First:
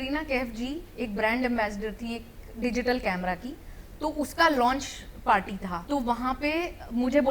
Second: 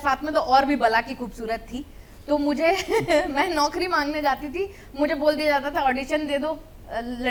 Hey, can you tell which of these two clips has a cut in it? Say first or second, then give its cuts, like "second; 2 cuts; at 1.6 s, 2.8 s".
first; 1 cut; at 5.8 s